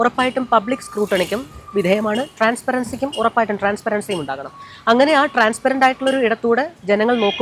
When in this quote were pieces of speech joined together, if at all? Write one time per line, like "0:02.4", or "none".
none